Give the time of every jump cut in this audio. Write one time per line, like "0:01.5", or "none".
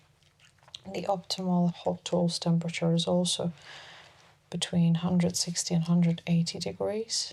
0:01.8